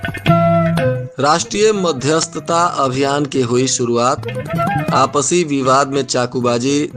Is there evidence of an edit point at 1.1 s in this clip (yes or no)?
yes